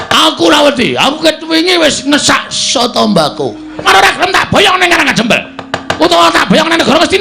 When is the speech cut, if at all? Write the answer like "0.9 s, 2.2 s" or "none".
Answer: 3.8 s